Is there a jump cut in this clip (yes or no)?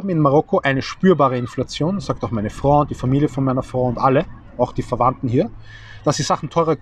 no